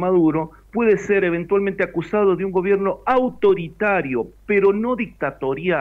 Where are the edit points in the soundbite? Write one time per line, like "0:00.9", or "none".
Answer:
none